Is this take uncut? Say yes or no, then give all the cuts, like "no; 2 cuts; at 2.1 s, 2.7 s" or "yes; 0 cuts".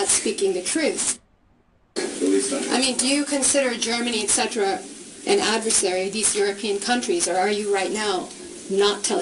yes; 0 cuts